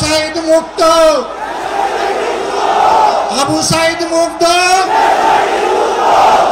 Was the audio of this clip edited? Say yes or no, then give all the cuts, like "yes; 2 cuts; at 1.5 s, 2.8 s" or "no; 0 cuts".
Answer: no; 0 cuts